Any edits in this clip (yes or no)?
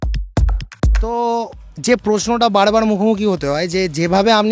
yes